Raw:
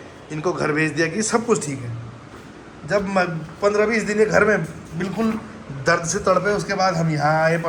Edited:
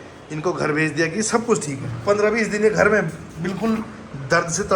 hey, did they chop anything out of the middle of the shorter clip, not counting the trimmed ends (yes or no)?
yes